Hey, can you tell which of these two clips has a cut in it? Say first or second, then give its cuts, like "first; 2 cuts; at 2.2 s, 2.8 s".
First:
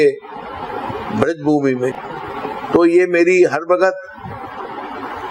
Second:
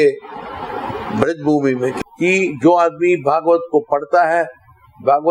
second; 1 cut; at 2.0 s